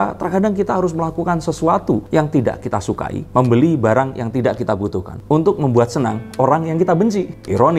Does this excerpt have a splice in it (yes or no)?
no